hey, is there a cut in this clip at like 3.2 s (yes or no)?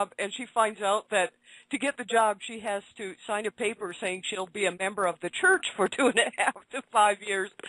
yes